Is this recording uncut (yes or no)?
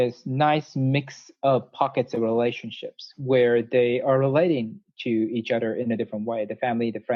yes